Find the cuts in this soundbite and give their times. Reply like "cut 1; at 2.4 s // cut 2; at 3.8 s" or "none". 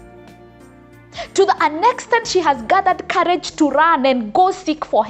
cut 1; at 1.1 s